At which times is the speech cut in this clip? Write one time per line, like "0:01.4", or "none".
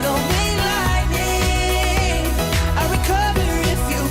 none